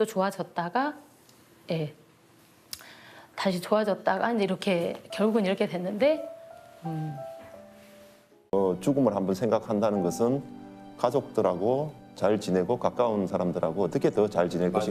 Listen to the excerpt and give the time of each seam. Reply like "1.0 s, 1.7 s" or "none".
8.5 s